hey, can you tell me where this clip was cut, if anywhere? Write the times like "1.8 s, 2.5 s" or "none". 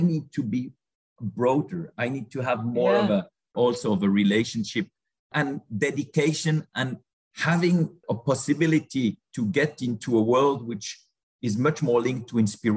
3.5 s, 7.0 s